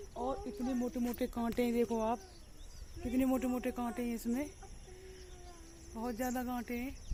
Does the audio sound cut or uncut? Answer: uncut